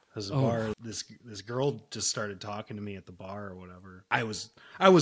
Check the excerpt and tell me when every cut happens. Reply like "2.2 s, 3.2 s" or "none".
0.8 s, 4.0 s